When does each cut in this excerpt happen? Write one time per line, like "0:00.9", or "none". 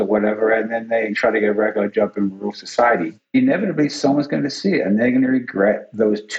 0:01.1
0:03.3